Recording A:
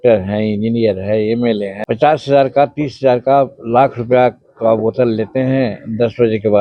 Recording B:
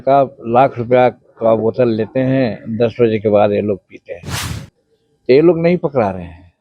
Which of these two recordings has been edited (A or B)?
A